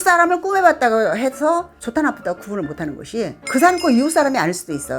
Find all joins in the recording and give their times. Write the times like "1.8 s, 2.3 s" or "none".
1.7 s